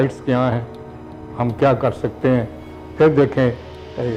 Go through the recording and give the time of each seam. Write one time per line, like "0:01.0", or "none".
none